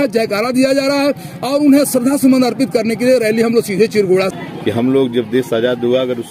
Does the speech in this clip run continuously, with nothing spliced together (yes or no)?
no